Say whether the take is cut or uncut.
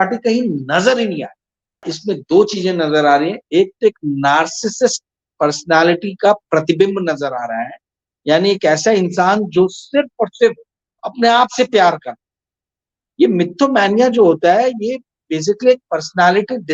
cut